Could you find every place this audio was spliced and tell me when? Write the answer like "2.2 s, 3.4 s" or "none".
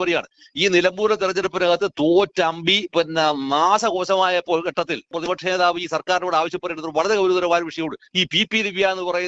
5.2 s, 8.0 s

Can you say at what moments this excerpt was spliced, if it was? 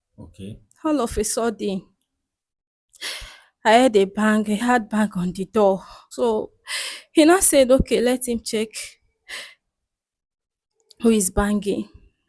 6.0 s

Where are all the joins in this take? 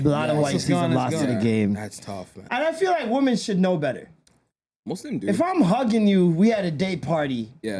2.3 s

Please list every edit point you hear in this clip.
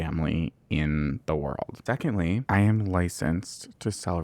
2.0 s

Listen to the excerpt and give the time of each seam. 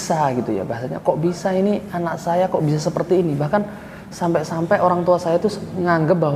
none

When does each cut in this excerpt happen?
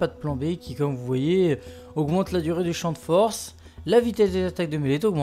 3.1 s

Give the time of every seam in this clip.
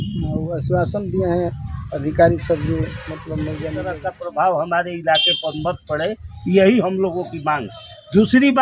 3.7 s

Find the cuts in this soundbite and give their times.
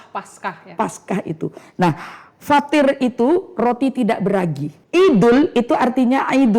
4.7 s

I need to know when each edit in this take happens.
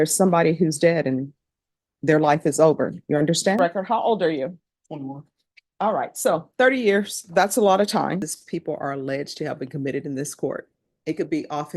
3.6 s, 8.4 s

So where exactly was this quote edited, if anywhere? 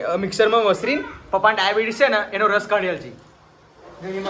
none

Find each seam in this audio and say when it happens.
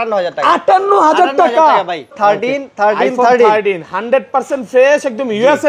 2.1 s

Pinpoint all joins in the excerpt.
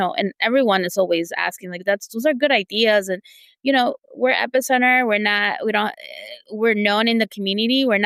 none

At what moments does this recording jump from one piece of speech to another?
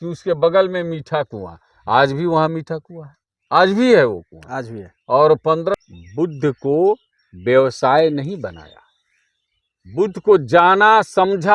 5.7 s

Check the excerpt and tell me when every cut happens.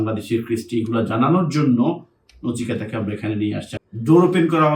3.7 s

